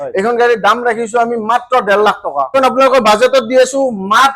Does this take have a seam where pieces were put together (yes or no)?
yes